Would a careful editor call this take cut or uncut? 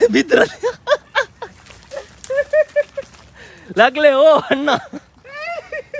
uncut